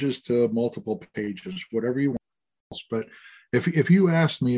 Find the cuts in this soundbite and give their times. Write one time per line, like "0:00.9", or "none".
0:02.8